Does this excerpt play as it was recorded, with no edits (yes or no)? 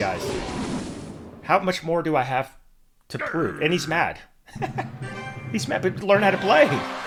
yes